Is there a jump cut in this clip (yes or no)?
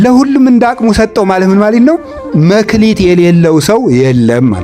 no